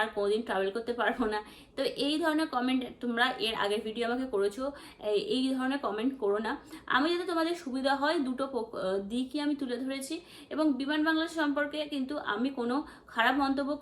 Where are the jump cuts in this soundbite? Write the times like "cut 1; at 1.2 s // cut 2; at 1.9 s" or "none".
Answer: none